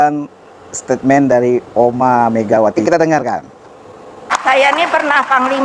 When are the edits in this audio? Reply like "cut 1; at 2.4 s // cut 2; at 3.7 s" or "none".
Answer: none